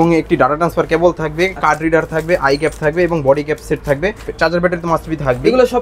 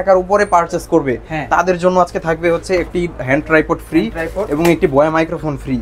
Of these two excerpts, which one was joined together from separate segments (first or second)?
first